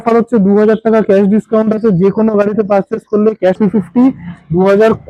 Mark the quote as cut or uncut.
cut